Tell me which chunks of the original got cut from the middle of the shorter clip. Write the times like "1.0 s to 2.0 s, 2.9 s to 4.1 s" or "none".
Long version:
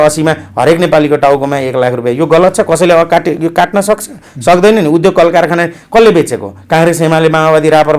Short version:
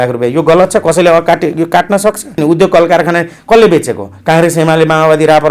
4.2 s to 4.8 s